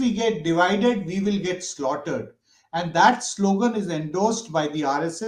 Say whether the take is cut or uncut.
uncut